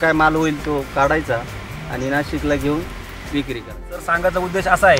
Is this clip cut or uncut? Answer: uncut